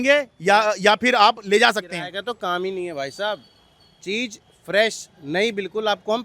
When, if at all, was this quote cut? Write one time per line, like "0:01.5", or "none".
none